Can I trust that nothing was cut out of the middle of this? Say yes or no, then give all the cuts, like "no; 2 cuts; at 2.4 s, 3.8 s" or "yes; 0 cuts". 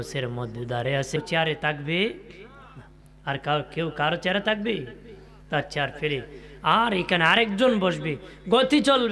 no; 1 cut; at 1.2 s